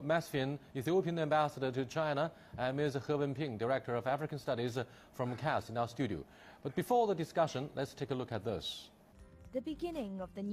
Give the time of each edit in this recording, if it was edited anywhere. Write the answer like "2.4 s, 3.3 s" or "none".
1.7 s